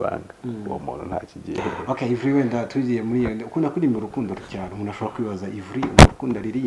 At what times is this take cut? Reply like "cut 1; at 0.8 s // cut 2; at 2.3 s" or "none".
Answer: cut 1; at 1.6 s